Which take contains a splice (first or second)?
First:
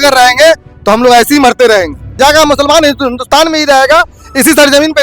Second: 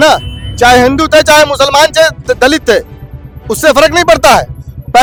first